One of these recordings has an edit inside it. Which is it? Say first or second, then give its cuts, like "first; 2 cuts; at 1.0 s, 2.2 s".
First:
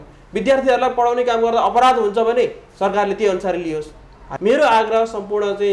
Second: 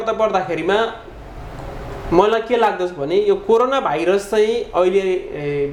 first; 1 cut; at 4.3 s